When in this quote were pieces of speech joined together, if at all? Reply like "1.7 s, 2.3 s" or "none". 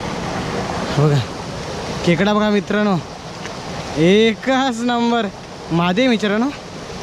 none